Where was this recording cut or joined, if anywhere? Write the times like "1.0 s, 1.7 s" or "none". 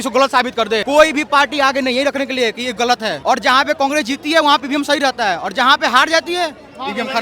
0.8 s, 3.2 s